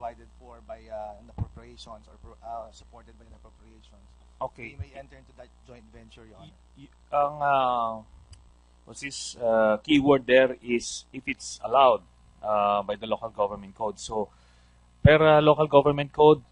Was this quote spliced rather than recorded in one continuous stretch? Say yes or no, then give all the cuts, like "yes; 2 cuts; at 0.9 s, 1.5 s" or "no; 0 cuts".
no; 0 cuts